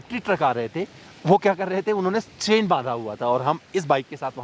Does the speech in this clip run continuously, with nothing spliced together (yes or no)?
yes